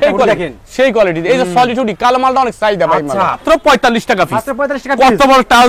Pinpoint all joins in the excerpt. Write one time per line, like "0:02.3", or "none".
0:03.4